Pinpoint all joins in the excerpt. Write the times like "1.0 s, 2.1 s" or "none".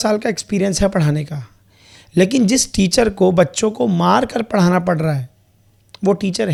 none